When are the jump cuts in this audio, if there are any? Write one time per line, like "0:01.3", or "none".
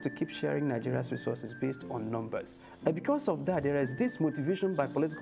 0:02.6